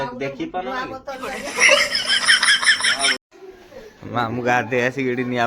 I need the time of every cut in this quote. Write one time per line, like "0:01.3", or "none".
0:03.3